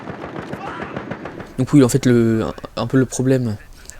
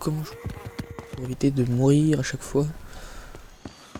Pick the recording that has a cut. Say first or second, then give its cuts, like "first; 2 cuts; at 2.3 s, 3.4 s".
first; 1 cut; at 1.9 s